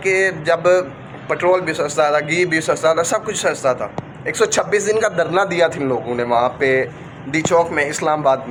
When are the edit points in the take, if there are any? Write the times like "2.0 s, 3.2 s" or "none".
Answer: none